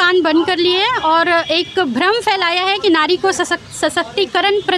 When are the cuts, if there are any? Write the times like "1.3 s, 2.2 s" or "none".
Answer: none